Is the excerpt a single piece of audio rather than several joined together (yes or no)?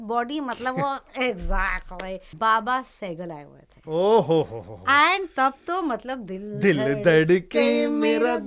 no